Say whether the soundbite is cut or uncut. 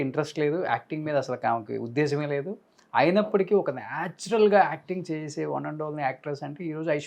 uncut